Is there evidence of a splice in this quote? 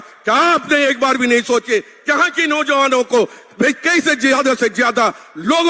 no; 0 cuts

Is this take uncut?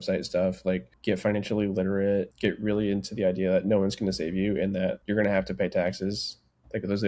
no; 3 cuts; at 0.9 s, 2.3 s, 5.0 s

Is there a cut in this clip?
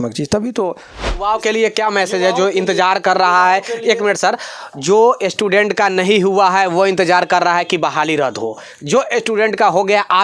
yes; 1 cut; at 1.1 s

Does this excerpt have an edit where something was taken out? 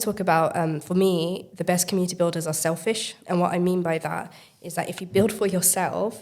yes; 2 cuts; at 1.5 s, 3.1 s

